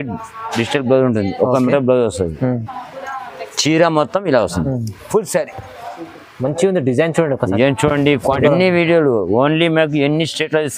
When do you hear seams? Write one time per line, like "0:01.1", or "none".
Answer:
0:08.4